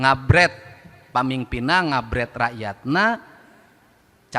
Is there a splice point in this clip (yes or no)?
no